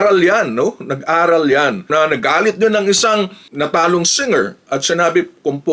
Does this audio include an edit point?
yes; 1 cut; at 1.9 s

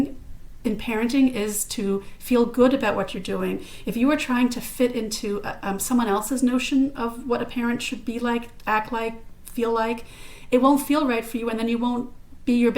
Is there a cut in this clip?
no; 0 cuts

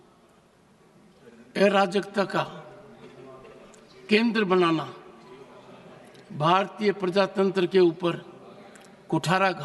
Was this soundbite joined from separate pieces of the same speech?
no; 0 cuts

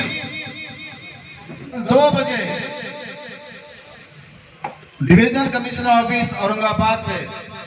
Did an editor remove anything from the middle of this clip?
yes; 1 cut; at 1.8 s

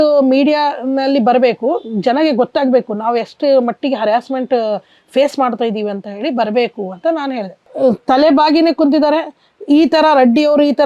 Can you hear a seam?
yes; 1 cut; at 7.7 s

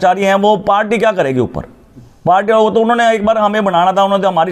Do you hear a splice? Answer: no; 0 cuts

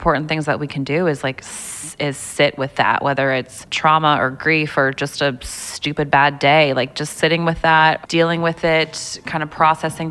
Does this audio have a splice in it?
yes; 2 cuts; at 3.6 s, 8.0 s

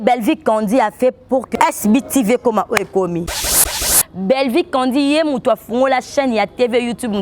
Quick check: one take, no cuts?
no; 2 cuts; at 1.5 s, 3.9 s

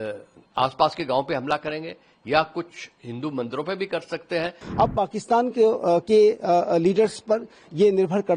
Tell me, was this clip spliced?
yes; 1 cut; at 4.6 s

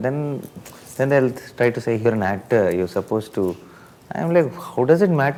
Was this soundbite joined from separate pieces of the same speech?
no; 0 cuts

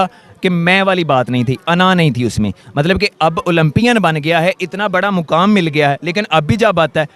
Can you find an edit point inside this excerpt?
no; 0 cuts

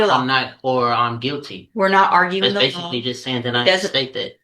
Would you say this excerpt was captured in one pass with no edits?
yes; 0 cuts

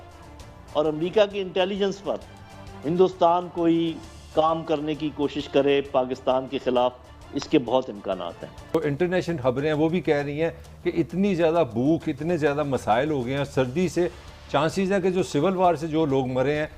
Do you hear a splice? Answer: yes; 1 cut; at 8.7 s

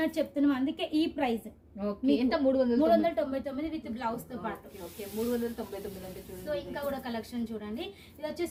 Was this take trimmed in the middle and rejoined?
no; 0 cuts

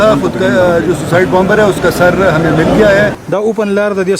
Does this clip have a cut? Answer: yes; 1 cut; at 3.2 s

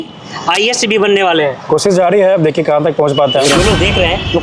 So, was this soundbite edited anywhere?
yes; 2 cuts; at 1.6 s, 3.4 s

